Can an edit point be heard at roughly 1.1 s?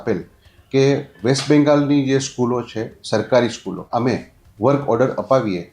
no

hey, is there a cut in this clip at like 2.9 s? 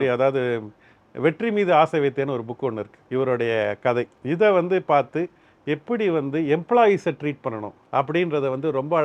yes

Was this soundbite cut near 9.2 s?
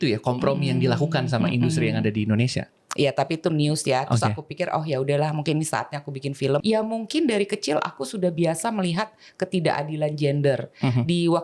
no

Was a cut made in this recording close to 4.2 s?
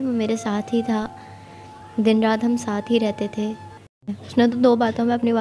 yes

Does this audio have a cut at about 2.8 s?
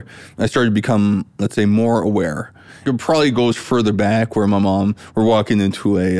yes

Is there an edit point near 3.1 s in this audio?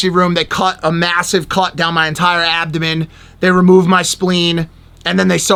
no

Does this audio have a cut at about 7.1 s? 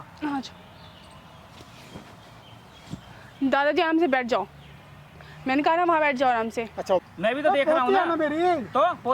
yes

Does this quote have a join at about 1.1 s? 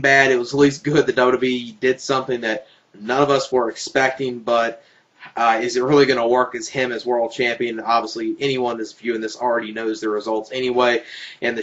yes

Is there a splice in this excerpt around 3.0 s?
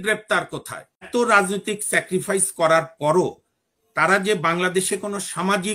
no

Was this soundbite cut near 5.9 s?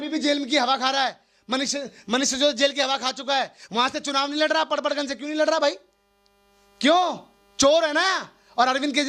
no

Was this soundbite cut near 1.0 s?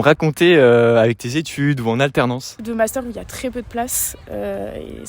no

